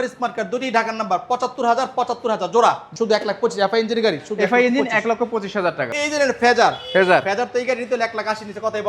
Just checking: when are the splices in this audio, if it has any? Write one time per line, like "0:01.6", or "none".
0:02.9
0:05.9